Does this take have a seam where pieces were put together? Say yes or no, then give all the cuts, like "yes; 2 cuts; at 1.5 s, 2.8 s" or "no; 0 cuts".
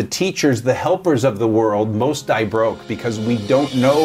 no; 0 cuts